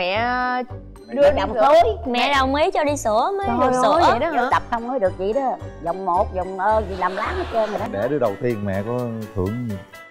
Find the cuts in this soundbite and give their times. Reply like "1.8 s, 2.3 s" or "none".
7.9 s